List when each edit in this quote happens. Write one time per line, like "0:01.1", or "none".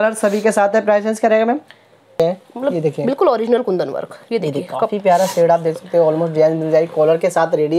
0:02.2